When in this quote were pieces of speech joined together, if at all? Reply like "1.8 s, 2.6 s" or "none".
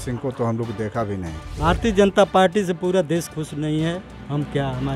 1.5 s